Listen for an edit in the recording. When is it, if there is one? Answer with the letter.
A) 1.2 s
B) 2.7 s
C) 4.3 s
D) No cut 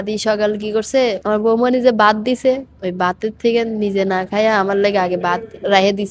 A